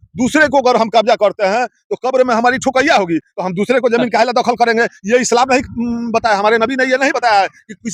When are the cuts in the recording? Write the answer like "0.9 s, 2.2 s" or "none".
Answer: none

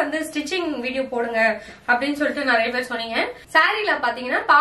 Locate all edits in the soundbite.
3.4 s

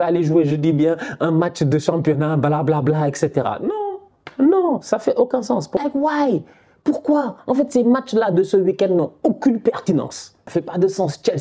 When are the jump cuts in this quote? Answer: 5.8 s, 10.4 s

